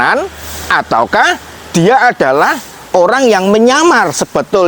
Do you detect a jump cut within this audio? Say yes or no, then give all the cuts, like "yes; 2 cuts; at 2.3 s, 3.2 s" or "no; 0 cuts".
no; 0 cuts